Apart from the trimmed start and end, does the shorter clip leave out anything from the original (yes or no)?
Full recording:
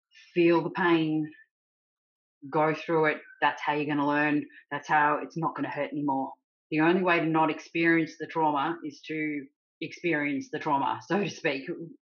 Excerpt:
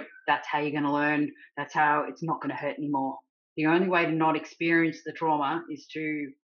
no